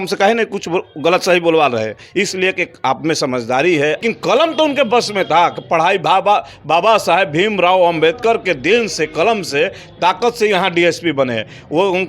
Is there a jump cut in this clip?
yes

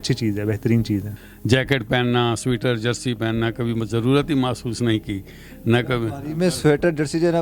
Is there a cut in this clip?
yes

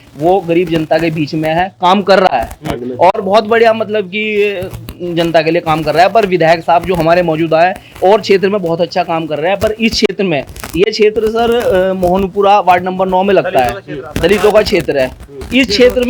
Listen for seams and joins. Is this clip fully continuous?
yes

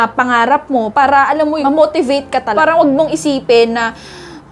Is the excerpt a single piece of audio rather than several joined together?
no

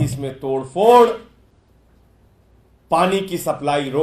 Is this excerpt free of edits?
yes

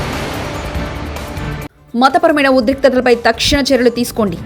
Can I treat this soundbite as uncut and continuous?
yes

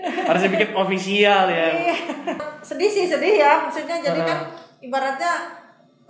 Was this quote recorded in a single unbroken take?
no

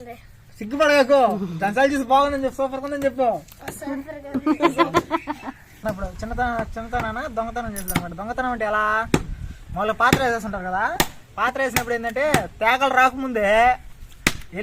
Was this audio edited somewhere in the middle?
yes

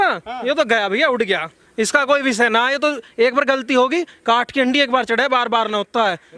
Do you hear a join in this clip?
no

